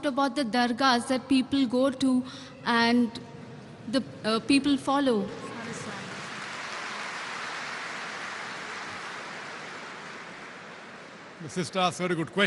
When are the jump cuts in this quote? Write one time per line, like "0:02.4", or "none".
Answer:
0:08.7